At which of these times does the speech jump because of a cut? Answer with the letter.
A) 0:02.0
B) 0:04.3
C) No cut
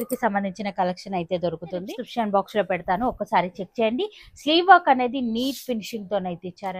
A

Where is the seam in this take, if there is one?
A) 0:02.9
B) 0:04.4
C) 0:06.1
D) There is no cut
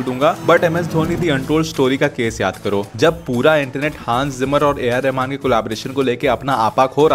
A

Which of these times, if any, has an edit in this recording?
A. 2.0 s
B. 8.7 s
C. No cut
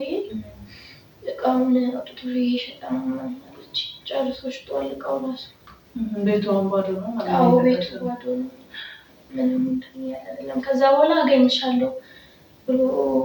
C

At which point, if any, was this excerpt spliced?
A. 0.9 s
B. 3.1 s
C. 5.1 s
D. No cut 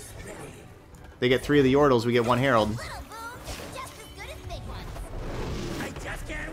A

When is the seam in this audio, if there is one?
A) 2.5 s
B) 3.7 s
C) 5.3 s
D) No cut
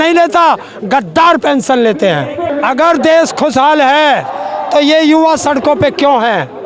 A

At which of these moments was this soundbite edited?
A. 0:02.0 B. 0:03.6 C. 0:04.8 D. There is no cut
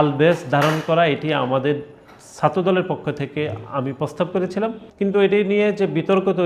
C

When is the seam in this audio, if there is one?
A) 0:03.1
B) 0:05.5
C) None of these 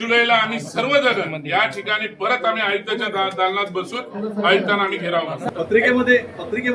B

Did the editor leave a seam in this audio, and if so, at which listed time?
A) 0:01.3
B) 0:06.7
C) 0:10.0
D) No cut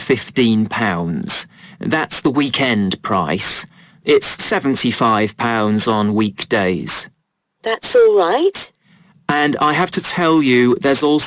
A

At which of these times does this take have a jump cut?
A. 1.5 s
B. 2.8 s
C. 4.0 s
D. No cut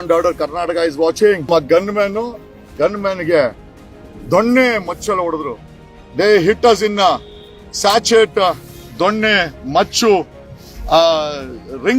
A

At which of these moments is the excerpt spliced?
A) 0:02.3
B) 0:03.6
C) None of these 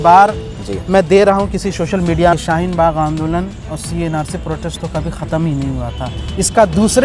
A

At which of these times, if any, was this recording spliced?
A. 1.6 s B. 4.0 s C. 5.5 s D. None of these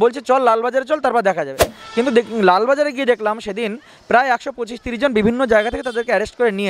A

